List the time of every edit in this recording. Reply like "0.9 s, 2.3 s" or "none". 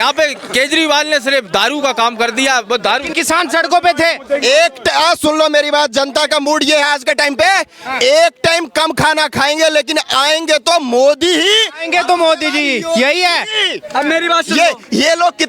3.1 s